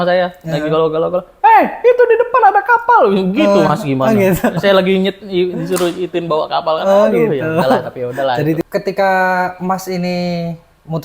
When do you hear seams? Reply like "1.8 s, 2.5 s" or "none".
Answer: 8.6 s